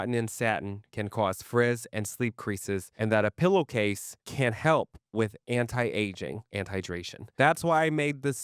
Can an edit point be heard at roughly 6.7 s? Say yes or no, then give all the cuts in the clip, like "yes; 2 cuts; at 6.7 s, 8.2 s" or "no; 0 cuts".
yes; 1 cut; at 6.7 s